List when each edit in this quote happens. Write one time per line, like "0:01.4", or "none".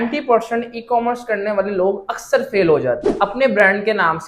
0:03.1